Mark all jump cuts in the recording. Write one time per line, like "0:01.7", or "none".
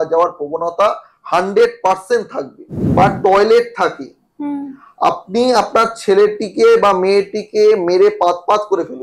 0:02.7